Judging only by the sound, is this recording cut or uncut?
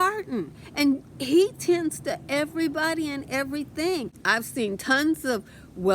cut